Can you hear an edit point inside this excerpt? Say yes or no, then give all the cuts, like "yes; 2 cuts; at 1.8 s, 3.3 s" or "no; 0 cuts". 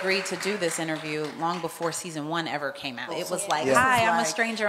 yes; 1 cut; at 3.2 s